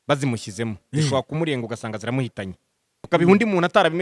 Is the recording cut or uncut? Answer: cut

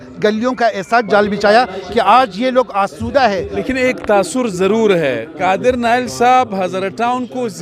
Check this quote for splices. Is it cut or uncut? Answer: cut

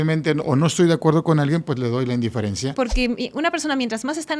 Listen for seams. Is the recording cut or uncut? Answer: cut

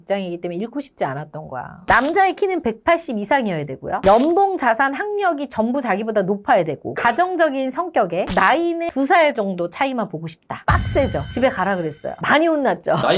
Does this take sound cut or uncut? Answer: cut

